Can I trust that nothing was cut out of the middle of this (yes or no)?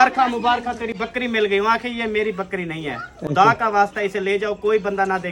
yes